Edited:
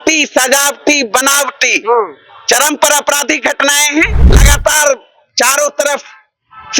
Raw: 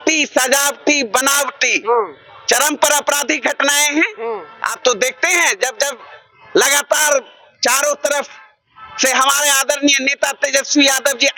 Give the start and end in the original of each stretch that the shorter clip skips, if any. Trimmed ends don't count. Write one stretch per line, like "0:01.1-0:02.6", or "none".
0:04.4-0:06.7